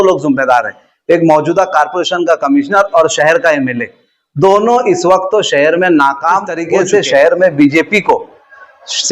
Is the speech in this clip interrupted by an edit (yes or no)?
yes